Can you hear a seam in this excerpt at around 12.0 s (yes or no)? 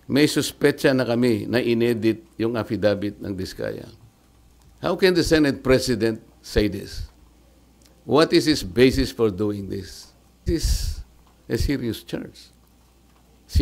no